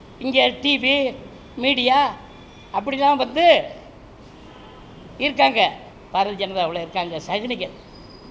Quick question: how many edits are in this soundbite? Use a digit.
1